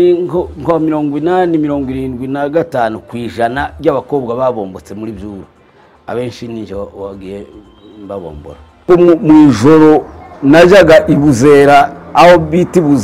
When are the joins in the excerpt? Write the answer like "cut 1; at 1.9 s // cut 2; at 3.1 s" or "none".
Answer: cut 1; at 8.8 s